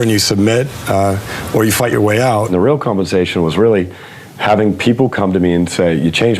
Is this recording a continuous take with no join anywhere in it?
no; 1 cut; at 2.5 s

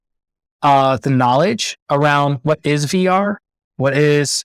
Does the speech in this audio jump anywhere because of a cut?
no; 0 cuts

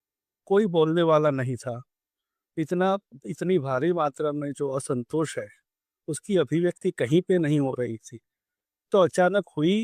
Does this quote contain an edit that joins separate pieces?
no; 0 cuts

